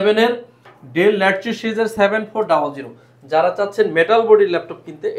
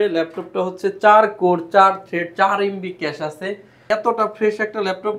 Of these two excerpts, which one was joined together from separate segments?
second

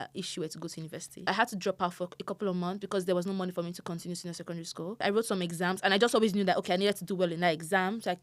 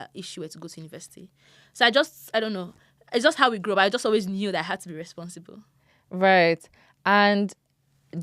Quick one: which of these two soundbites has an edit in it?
first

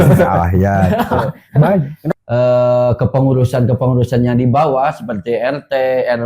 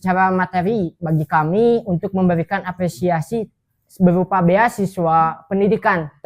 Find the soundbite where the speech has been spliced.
first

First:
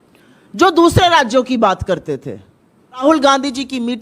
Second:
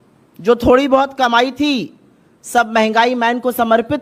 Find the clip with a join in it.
first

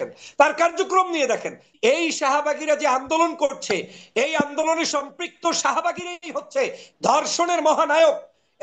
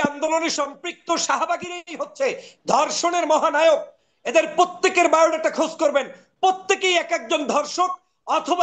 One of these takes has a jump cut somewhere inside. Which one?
first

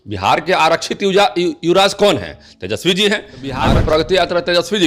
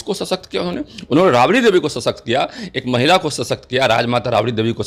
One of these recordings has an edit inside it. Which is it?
first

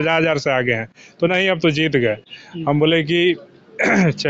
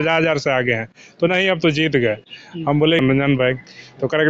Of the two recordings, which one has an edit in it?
second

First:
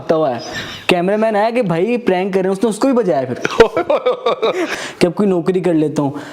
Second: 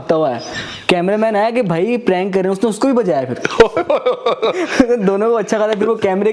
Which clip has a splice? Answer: first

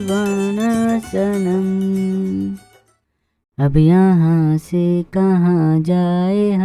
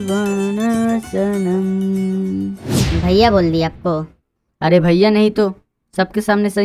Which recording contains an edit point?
second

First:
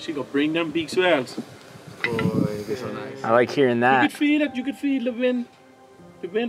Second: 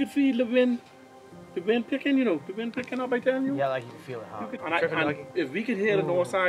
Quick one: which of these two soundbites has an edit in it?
second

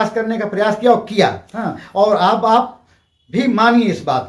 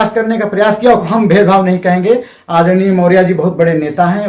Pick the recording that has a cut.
second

